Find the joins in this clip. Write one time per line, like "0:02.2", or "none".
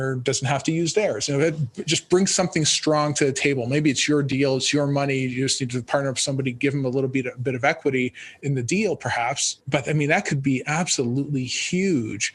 0:09.5